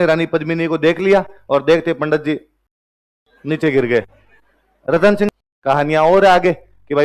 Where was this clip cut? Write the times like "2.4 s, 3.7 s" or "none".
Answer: 5.3 s